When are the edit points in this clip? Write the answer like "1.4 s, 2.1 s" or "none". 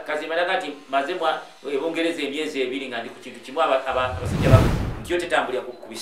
4.6 s